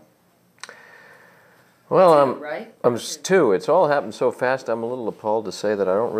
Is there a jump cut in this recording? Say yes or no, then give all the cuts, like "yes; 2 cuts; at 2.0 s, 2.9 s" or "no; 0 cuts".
yes; 1 cut; at 4.9 s